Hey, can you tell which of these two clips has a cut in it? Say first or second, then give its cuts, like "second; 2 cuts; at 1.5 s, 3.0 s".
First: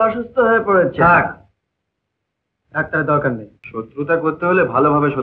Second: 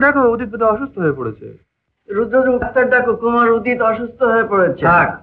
first; 1 cut; at 3.6 s